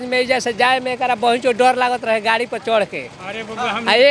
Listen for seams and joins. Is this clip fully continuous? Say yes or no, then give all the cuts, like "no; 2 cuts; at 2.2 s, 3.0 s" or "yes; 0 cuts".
yes; 0 cuts